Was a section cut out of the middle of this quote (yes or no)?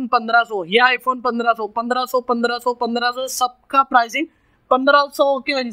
no